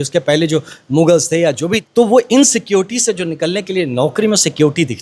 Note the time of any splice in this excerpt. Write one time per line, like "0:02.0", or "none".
0:01.9